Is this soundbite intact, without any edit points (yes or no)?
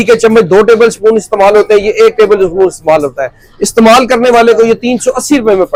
yes